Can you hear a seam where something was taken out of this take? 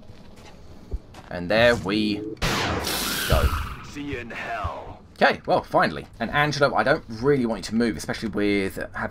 yes; 1 cut; at 6.0 s

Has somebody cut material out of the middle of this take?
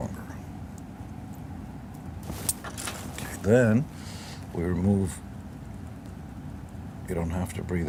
no; 0 cuts

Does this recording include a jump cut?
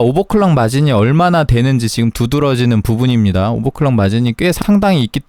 no; 0 cuts

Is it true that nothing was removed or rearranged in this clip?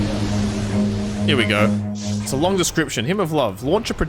no; 1 cut; at 2.2 s

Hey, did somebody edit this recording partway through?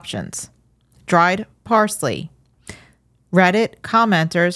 no; 0 cuts

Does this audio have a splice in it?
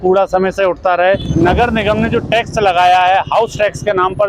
yes; 1 cut; at 1.3 s

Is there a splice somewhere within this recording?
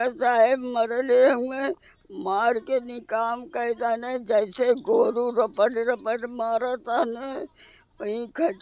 no; 0 cuts

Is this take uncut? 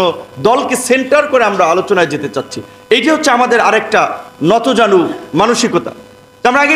yes; 0 cuts

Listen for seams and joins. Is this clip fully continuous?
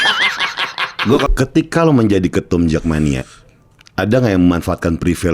no; 1 cut; at 1.3 s

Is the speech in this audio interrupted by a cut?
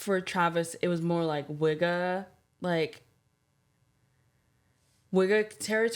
no; 0 cuts

